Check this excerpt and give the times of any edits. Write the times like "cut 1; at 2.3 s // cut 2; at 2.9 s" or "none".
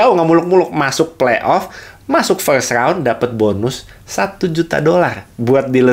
none